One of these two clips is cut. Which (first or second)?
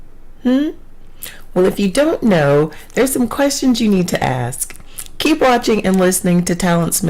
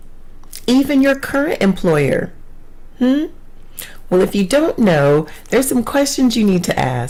first